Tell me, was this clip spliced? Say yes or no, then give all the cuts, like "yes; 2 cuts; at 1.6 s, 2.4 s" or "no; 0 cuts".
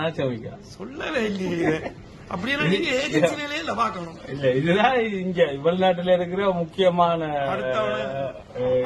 no; 0 cuts